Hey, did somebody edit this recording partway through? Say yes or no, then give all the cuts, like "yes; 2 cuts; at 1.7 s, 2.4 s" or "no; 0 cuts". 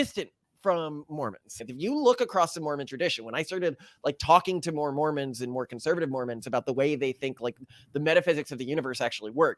yes; 1 cut; at 1.6 s